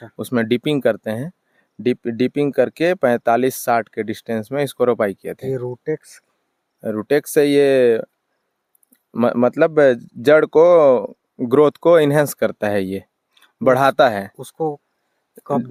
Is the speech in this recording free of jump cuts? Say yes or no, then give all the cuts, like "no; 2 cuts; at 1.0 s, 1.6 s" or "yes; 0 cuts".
yes; 0 cuts